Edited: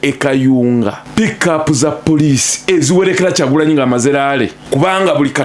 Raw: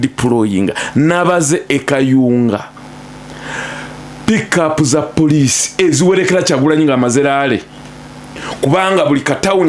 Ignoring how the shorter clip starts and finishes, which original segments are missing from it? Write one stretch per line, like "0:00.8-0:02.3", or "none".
0:02.7-0:04.1
0:07.7-0:08.5